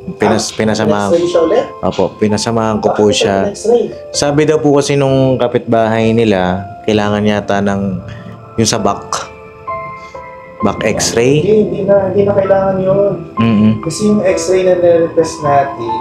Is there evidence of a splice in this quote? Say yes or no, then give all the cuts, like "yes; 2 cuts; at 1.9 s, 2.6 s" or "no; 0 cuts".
no; 0 cuts